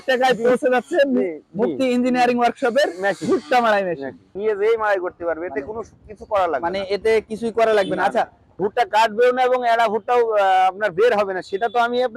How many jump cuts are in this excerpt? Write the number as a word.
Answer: two